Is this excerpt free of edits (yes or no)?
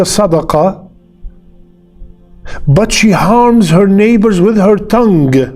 yes